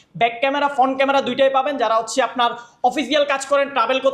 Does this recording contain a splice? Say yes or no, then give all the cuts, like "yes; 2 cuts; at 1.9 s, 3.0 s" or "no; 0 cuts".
no; 0 cuts